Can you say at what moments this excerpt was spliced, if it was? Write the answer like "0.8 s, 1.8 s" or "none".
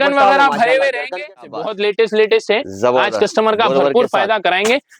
1.4 s